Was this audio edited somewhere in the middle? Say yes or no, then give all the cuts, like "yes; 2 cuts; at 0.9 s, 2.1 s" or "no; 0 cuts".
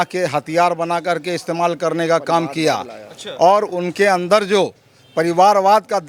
no; 0 cuts